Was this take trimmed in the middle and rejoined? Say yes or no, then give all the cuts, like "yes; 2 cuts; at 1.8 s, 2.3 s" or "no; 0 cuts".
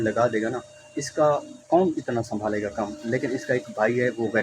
no; 0 cuts